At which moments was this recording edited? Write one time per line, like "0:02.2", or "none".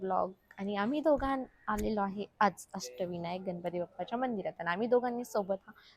none